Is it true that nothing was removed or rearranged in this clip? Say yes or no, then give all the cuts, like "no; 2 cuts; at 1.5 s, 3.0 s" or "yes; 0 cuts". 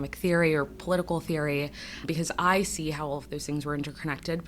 yes; 0 cuts